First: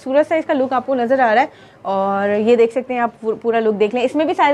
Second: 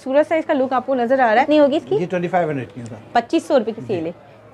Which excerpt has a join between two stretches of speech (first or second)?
second